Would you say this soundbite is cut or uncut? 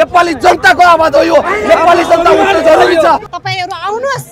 cut